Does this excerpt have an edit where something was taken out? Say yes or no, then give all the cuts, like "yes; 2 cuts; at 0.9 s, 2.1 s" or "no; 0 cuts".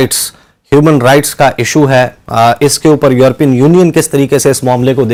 no; 0 cuts